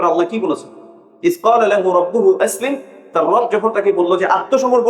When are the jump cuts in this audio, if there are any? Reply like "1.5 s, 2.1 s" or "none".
1.0 s